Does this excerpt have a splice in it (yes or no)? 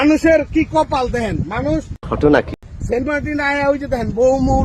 no